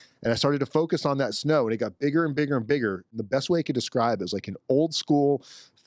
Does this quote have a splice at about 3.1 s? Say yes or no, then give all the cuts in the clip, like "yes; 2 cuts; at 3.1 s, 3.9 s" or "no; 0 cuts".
yes; 1 cut; at 3.1 s